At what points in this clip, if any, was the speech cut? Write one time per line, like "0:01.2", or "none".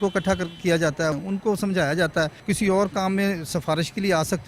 0:01.2
0:02.4